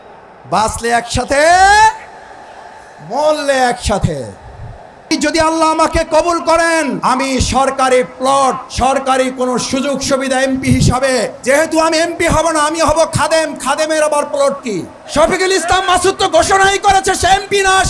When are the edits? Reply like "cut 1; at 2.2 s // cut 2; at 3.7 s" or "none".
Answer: cut 1; at 5.1 s // cut 2; at 7.0 s // cut 3; at 8.7 s // cut 4; at 11.3 s // cut 5; at 15.0 s